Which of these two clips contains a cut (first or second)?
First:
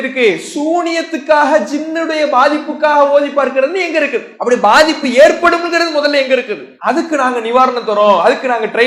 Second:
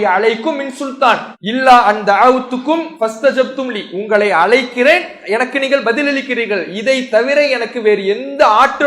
second